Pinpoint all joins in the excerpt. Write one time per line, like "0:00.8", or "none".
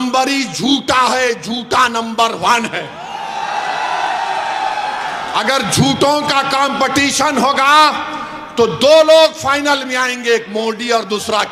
none